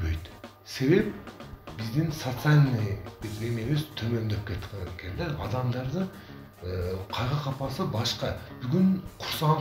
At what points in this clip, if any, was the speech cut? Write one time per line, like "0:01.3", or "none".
none